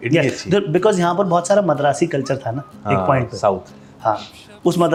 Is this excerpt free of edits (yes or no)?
yes